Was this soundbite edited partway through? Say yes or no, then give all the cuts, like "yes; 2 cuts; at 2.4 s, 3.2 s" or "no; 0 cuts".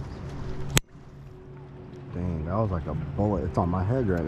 no; 0 cuts